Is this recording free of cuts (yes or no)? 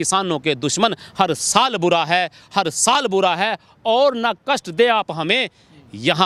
yes